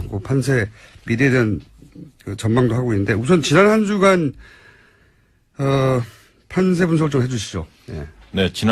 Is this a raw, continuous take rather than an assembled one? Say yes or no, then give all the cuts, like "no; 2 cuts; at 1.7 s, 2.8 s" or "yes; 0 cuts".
yes; 0 cuts